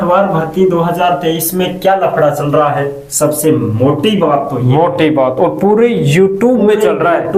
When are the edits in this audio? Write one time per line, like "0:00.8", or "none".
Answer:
none